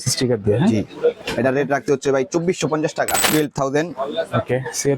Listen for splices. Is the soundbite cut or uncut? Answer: cut